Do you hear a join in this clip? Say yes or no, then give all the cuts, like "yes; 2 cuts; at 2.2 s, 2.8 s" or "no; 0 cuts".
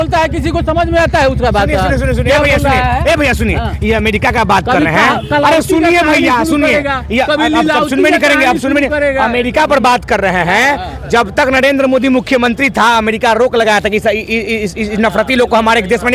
no; 0 cuts